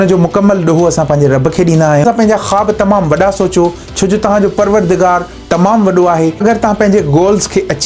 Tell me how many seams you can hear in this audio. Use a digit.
2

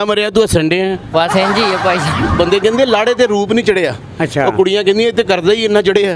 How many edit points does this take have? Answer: 1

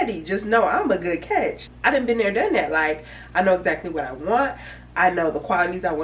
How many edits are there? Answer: 1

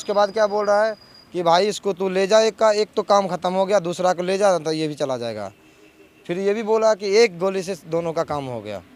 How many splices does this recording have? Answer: 0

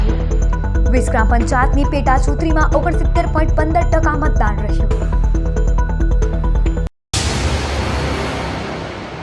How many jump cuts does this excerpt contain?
1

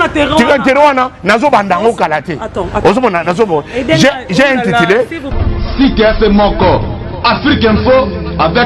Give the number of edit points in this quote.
1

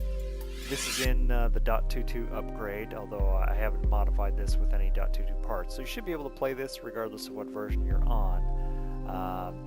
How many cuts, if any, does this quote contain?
1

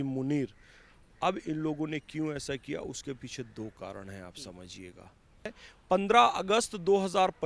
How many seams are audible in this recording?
1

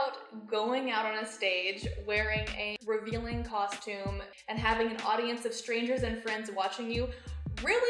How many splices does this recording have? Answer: 2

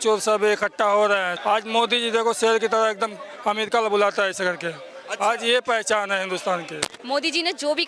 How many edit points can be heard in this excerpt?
2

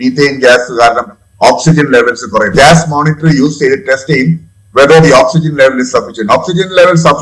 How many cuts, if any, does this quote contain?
1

